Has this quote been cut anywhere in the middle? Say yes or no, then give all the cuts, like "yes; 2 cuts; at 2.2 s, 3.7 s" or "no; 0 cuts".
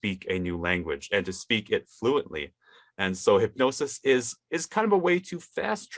no; 0 cuts